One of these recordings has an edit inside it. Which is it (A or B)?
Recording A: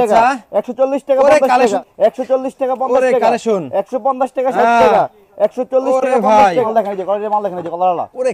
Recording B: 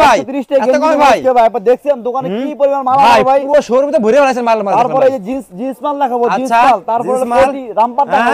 A